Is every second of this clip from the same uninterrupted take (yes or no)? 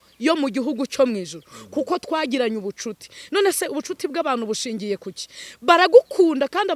yes